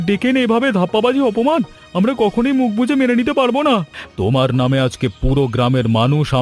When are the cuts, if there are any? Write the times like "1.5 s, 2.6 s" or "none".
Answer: 4.0 s